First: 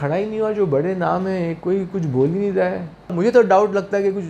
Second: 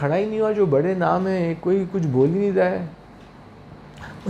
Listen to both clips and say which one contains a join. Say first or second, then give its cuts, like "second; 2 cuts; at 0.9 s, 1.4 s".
first; 1 cut; at 3.1 s